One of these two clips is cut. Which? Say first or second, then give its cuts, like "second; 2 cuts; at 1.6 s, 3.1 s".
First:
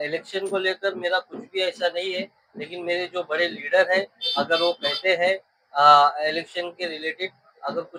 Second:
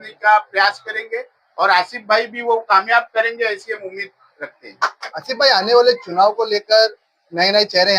second; 1 cut; at 5.0 s